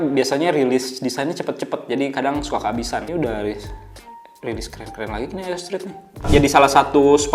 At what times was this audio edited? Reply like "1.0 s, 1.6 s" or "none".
3.1 s, 6.3 s